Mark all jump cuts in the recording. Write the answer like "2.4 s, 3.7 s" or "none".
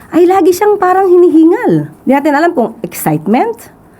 1.9 s